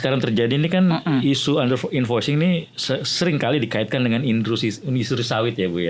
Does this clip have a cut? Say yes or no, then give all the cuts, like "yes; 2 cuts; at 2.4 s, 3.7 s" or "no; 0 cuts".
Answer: no; 0 cuts